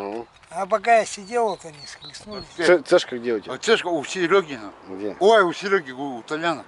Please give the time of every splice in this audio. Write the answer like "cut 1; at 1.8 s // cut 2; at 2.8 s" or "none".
cut 1; at 2.5 s